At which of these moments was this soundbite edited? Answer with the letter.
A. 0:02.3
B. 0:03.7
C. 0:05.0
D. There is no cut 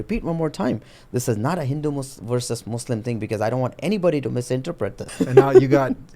C